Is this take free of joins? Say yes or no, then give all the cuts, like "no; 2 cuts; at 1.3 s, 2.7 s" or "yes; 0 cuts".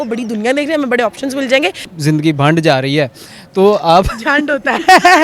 no; 1 cut; at 1.9 s